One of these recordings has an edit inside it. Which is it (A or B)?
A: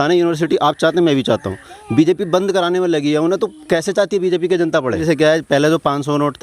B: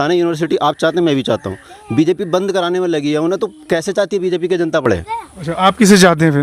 A